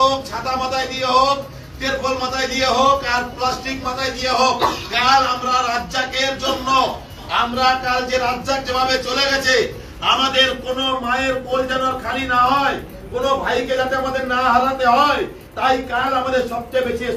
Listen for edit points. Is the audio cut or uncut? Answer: uncut